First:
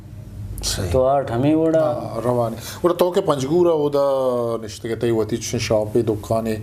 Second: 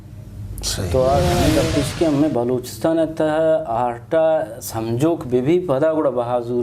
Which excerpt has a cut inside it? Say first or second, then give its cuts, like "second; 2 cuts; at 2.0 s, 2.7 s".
second; 1 cut; at 1.5 s